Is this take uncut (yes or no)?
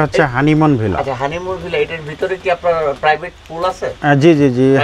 yes